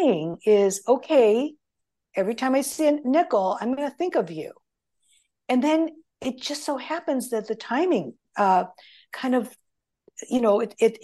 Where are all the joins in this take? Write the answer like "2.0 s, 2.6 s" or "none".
none